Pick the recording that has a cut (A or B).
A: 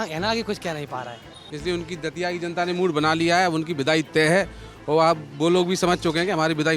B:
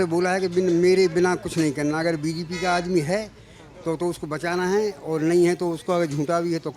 A